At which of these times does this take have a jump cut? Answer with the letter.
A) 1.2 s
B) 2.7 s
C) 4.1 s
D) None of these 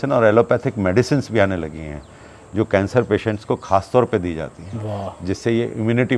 D